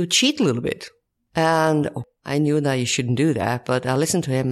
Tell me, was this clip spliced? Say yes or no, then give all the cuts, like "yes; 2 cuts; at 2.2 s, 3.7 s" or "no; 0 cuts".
yes; 1 cut; at 2.0 s